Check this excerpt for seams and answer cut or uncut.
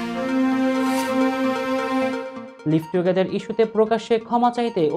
uncut